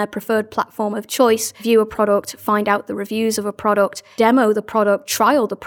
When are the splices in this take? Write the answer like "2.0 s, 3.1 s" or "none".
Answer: 1.6 s, 4.0 s